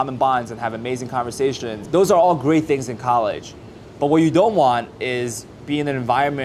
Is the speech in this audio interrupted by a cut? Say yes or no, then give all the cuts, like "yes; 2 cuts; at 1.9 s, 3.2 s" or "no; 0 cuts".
yes; 1 cut; at 1.7 s